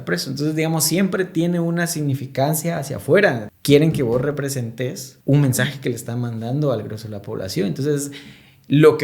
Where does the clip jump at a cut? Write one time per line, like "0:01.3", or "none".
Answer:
0:03.5
0:05.1